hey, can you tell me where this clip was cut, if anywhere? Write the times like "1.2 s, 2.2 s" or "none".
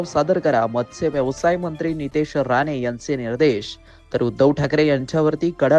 none